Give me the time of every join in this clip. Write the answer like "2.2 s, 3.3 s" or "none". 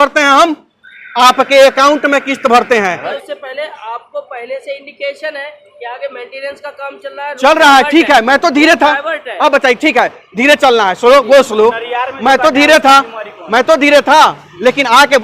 3.1 s

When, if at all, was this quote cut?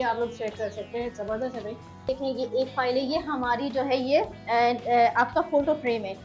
2.1 s

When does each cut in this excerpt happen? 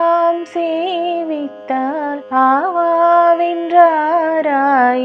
2.2 s

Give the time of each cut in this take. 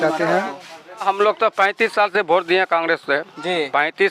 1.0 s

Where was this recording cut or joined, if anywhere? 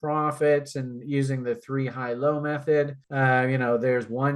3.0 s

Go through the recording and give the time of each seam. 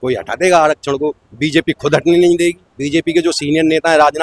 none

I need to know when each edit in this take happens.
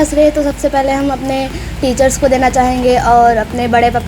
none

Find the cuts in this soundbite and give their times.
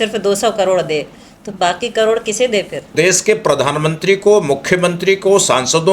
2.9 s

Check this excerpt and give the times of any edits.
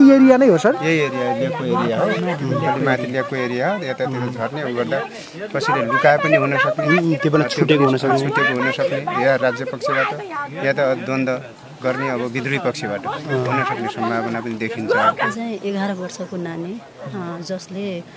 15.3 s

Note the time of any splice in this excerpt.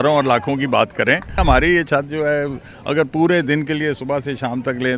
1.4 s

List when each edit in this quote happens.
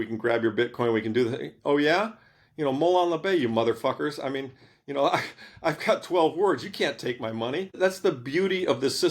7.8 s

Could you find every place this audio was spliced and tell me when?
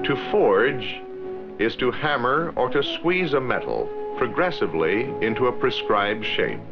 4.4 s

